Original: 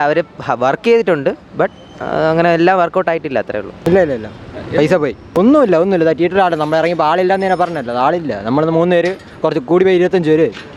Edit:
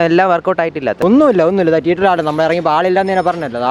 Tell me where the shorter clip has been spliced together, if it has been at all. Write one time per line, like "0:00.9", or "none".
0:00.9